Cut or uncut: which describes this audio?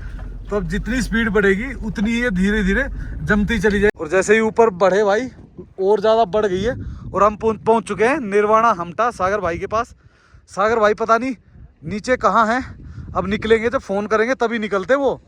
cut